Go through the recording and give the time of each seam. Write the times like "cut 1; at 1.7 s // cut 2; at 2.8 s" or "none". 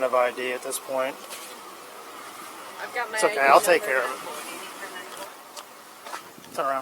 cut 1; at 1.2 s